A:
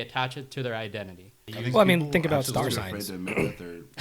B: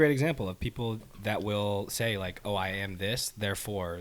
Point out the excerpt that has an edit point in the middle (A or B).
A